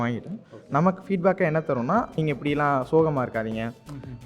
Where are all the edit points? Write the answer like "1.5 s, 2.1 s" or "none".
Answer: 2.2 s